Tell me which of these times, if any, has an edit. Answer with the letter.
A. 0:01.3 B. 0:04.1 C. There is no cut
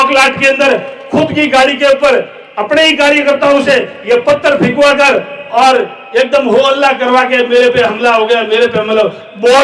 C